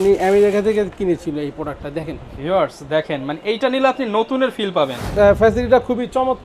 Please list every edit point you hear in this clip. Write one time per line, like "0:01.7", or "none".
0:05.0